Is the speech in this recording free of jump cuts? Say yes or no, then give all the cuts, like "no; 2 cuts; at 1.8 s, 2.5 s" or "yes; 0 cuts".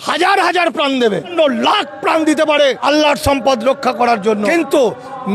no; 3 cuts; at 1.3 s, 2.8 s, 4.4 s